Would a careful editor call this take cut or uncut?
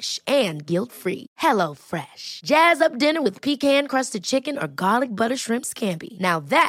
uncut